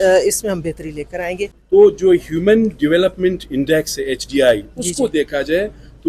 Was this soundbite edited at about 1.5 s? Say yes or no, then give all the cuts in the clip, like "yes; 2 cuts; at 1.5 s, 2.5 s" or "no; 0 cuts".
yes; 1 cut; at 1.5 s